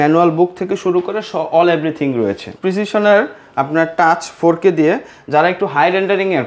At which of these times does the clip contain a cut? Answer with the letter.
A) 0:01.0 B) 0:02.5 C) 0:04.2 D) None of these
B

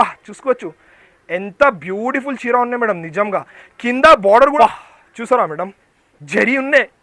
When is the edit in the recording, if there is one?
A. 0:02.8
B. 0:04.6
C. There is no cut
B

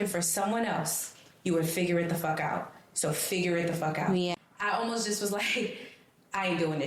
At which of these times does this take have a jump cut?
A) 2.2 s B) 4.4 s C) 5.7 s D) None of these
B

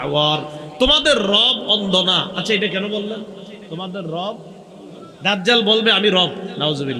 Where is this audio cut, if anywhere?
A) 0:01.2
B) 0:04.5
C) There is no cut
C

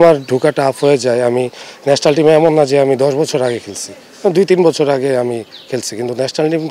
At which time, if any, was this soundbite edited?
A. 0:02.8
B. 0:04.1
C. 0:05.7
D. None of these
D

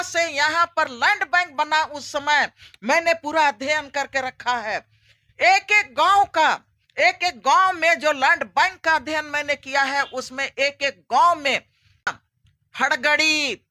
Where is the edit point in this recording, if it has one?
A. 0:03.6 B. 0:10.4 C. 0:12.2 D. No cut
C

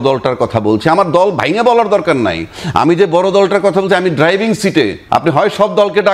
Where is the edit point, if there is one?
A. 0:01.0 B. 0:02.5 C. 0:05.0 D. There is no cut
C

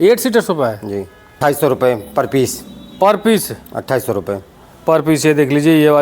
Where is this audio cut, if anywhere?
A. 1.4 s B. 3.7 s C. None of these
A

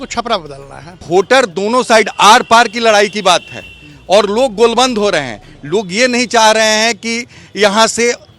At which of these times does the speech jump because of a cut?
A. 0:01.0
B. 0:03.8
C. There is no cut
A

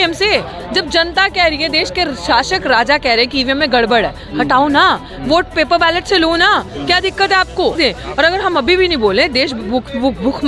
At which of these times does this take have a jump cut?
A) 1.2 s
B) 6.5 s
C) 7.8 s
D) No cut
C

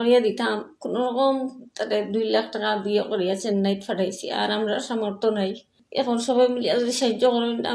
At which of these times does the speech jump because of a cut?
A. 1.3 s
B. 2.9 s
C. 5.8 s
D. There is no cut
C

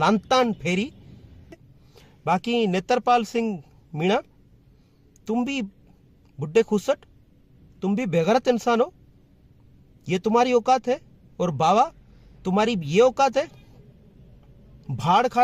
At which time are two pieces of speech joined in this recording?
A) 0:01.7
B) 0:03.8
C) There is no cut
A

